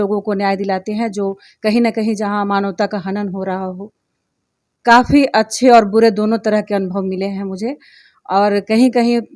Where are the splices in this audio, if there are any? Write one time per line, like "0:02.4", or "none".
0:04.7